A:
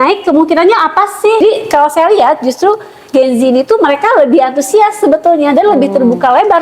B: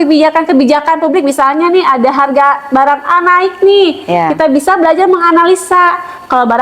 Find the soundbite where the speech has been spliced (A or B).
A